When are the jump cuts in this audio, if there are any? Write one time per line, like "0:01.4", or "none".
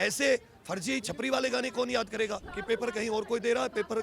0:02.5